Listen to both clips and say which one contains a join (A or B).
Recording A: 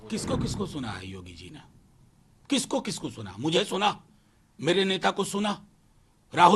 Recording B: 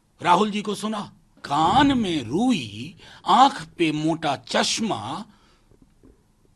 B